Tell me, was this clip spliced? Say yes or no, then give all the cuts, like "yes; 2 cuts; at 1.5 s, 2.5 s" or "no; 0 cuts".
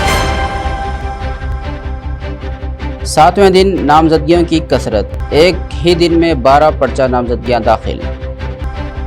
yes; 1 cut; at 1.2 s